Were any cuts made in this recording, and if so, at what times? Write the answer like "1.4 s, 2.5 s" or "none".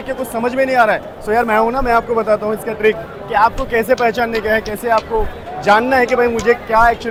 none